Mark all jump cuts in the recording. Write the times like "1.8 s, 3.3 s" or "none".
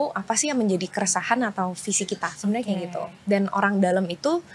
2.3 s